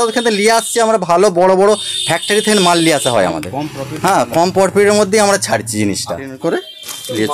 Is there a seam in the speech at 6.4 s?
yes; 1 cut; at 6.4 s

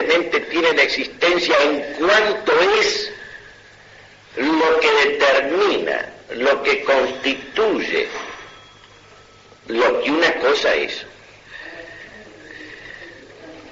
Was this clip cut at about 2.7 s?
yes; 1 cut; at 2.7 s

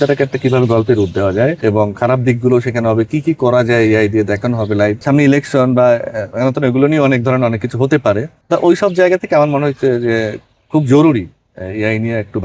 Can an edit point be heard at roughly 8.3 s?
yes; 3 cuts; at 1.6 s, 5.0 s, 8.3 s

